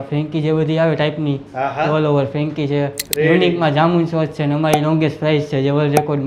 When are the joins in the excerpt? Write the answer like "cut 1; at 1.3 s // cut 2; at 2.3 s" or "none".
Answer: cut 1; at 3.0 s